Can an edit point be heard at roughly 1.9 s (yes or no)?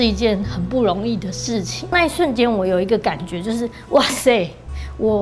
yes